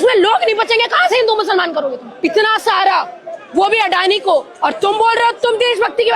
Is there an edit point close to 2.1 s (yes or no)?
yes